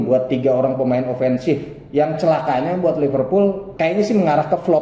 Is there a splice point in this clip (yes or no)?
yes